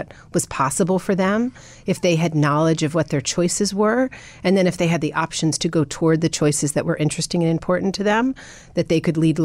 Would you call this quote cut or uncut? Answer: uncut